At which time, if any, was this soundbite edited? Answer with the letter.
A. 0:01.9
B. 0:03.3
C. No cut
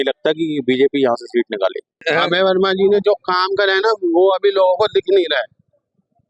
A